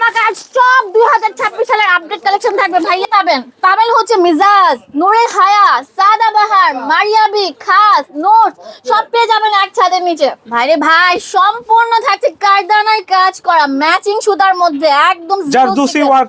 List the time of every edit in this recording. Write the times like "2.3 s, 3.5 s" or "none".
2.8 s, 10.4 s